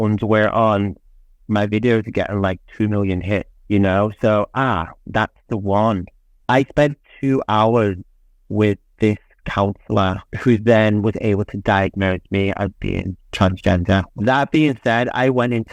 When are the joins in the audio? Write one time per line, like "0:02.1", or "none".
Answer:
0:06.3
0:14.1